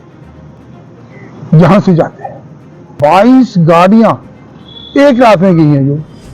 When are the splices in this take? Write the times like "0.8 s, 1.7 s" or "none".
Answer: 2.9 s